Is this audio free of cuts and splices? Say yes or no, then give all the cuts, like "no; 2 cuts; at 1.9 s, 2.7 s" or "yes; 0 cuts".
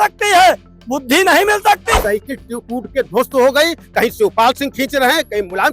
no; 1 cut; at 2.0 s